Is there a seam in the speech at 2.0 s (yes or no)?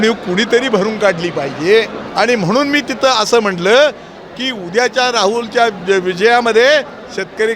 yes